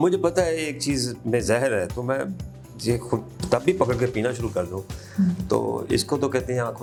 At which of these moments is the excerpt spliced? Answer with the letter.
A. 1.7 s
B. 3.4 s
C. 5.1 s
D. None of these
D